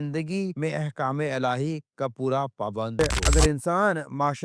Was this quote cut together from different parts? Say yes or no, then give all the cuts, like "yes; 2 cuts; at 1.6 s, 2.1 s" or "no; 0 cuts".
yes; 1 cut; at 3.0 s